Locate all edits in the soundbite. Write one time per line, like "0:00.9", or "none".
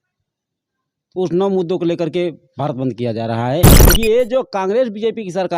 0:03.8